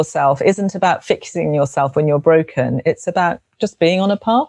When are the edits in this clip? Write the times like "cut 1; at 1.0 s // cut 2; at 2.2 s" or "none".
none

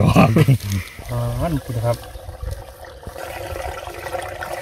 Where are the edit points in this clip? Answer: cut 1; at 1.0 s

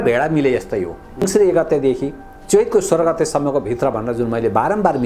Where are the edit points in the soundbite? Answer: cut 1; at 1.3 s

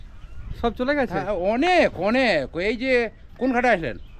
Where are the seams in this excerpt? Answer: none

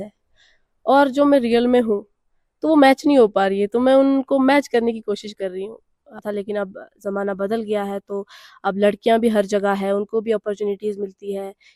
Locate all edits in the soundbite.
cut 1; at 6.2 s

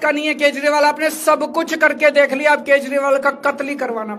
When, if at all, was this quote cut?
none

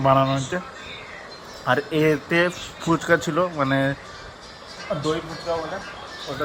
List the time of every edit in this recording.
none

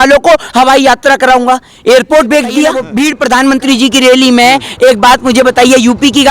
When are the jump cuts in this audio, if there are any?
cut 1; at 2.9 s

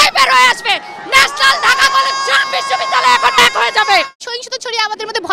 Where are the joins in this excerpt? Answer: cut 1; at 4.2 s

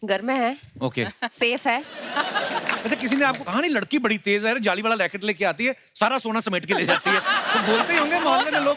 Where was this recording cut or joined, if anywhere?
none

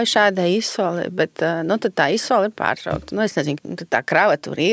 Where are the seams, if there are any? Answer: cut 1; at 3.6 s

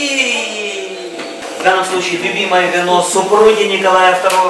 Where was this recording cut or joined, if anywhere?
cut 1; at 1.4 s

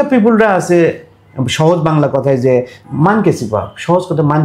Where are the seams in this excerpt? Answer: cut 1; at 2.8 s

